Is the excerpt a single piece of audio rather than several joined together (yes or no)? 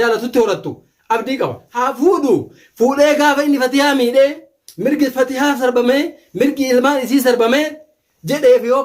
no